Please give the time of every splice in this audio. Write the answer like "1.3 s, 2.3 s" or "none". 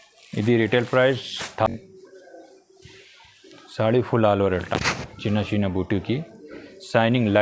1.7 s